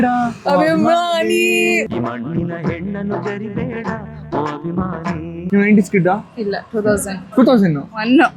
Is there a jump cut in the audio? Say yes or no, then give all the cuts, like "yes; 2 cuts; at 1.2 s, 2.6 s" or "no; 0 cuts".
no; 0 cuts